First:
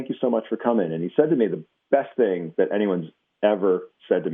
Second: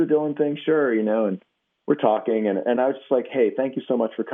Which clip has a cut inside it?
second; 1 cut; at 2.8 s

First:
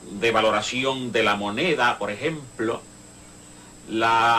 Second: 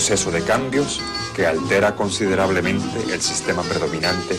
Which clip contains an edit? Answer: first; 1 cut; at 1.2 s

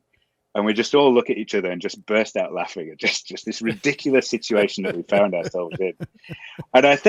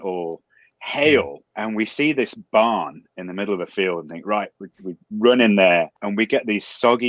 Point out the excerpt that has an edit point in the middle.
second; 2 cuts; at 1.4 s, 6.0 s

